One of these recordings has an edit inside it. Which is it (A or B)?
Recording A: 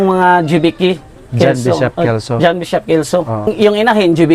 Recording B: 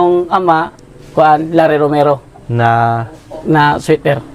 A